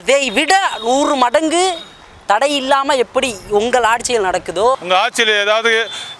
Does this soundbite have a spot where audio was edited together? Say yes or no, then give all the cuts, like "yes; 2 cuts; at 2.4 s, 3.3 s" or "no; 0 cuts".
yes; 1 cut; at 4.8 s